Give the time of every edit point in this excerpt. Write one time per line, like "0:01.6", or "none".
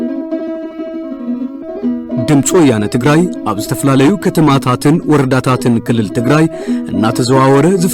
0:01.0